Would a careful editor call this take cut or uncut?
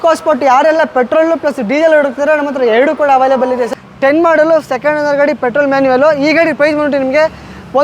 cut